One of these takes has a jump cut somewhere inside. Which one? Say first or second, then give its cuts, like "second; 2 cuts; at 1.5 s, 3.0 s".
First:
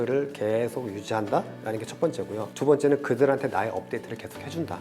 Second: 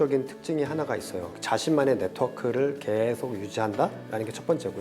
second; 1 cut; at 1.3 s